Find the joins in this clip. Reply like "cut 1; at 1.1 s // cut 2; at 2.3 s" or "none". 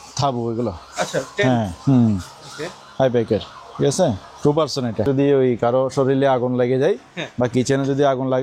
cut 1; at 5.1 s